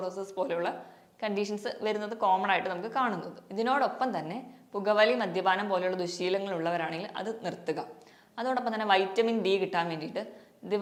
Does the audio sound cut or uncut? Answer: uncut